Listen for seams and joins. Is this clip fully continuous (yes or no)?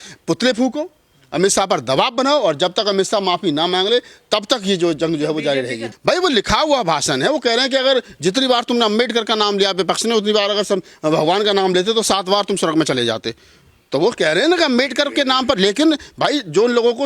no